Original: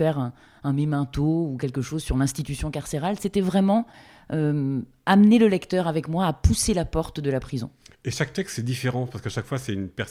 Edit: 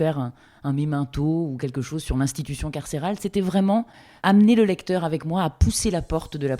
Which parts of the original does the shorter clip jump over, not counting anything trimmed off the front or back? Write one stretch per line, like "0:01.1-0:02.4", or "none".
0:04.1-0:04.9

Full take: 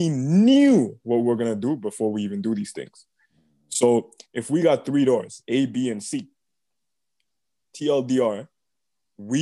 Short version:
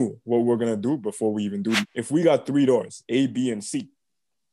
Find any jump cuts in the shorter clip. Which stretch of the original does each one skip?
0:02.7-0:04.3

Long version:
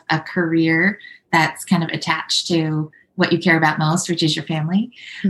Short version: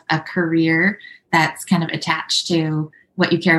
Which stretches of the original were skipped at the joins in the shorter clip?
none

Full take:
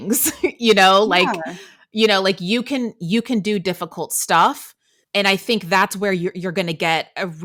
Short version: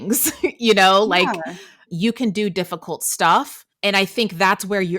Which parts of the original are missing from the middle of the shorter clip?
0:01.8-0:02.9
0:04.7-0:04.9

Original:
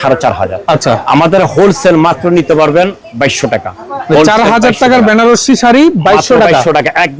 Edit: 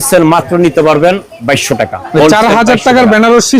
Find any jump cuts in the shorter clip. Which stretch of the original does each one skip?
0:03.7-0:03.9

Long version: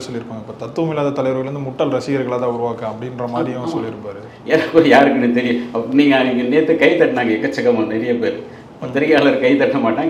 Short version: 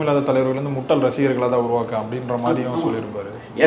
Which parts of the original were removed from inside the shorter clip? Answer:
none

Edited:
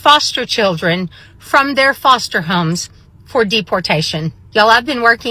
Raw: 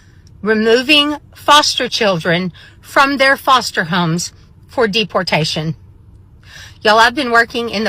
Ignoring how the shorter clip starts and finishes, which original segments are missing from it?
0:05.8-0:06.7

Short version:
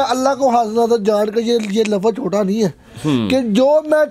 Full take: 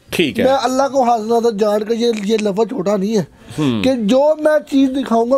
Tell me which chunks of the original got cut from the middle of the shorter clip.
none

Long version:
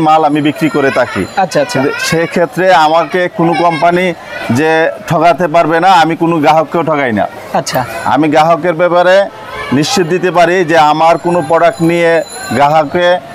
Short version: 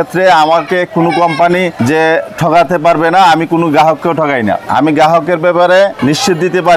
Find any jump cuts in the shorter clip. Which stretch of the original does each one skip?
0:04.2-0:04.4
0:07.3-0:08.0
0:09.3-0:09.6

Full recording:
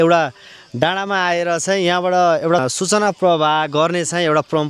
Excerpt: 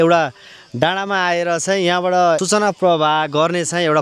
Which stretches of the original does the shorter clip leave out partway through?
0:02.4-0:02.8

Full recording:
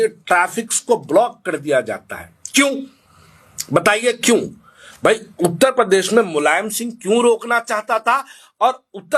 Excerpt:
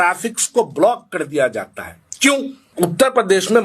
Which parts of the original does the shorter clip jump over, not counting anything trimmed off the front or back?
0:03.0-0:05.3

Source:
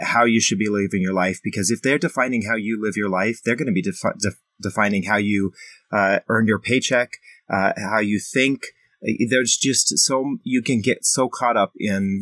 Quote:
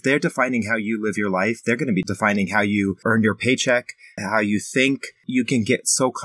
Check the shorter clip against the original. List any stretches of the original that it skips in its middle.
0:03.8-0:04.6
0:05.6-0:06.2
0:07.4-0:07.8
0:08.8-0:10.4

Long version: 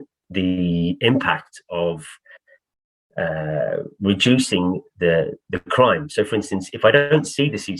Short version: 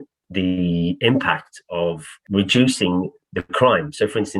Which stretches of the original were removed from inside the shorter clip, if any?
0:02.2-0:03.9
0:04.9-0:05.4

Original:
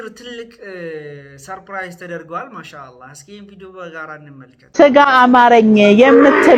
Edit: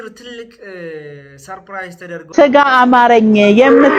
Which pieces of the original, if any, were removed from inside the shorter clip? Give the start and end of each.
0:02.3-0:04.7

